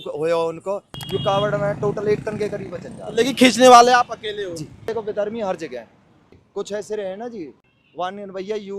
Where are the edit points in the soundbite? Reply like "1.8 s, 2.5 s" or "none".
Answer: 0.9 s, 4.8 s, 6.4 s, 7.7 s